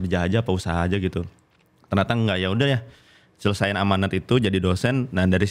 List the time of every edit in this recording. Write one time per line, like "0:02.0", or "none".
none